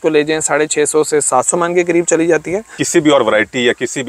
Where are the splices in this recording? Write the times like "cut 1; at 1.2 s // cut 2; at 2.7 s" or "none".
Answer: cut 1; at 2.8 s